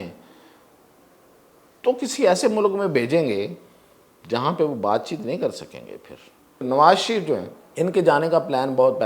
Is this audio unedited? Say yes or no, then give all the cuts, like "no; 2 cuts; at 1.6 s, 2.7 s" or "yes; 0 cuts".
no; 2 cuts; at 6.6 s, 7.6 s